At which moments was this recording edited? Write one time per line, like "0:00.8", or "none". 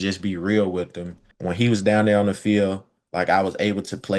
0:01.3